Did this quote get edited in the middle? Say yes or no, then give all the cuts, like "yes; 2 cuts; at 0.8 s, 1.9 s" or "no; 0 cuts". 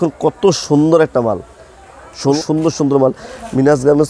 yes; 1 cut; at 2.4 s